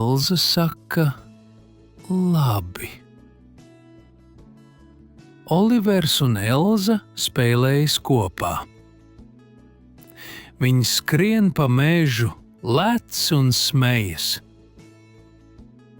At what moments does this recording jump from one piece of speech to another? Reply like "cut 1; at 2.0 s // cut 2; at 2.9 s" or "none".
cut 1; at 2.9 s // cut 2; at 4.7 s // cut 3; at 5.4 s // cut 4; at 8.7 s // cut 5; at 10.3 s